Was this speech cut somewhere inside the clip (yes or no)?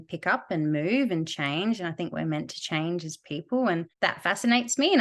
yes